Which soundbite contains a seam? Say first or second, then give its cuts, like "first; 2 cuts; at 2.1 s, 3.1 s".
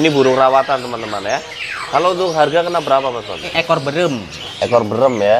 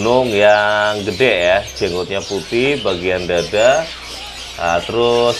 first; 1 cut; at 3.5 s